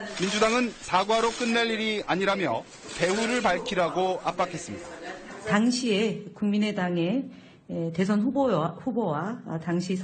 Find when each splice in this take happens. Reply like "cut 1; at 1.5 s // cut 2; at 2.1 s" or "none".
none